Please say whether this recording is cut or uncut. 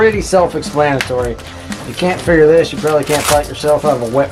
uncut